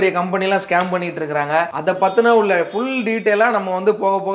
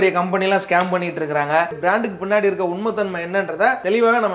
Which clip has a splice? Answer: second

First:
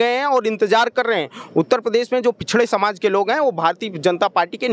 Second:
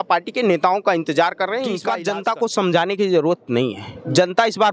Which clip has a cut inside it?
second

